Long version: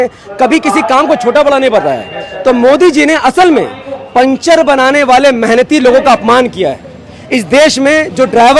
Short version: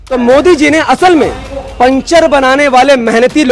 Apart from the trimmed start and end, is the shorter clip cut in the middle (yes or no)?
no